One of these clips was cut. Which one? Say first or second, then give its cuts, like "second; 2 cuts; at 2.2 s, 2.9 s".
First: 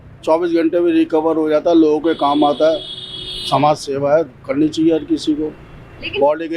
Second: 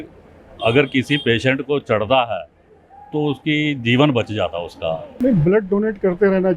second; 1 cut; at 5.1 s